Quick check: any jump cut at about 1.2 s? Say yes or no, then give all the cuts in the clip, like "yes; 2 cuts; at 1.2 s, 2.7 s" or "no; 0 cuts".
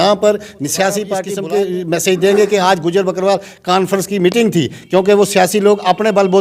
yes; 1 cut; at 1.2 s